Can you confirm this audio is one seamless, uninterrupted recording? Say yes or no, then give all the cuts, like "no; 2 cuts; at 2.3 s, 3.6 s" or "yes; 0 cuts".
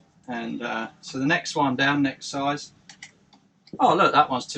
yes; 0 cuts